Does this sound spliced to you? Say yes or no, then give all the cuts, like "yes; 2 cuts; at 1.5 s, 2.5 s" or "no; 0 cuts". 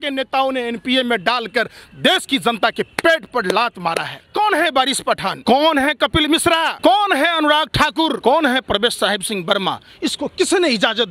yes; 4 cuts; at 4.2 s, 5.4 s, 6.7 s, 8.2 s